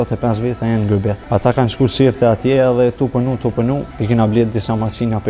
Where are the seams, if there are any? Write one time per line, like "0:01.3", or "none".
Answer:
0:01.2
0:03.9